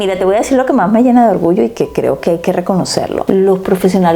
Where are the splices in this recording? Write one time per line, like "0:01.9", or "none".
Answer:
none